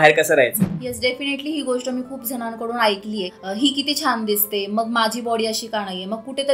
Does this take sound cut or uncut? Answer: uncut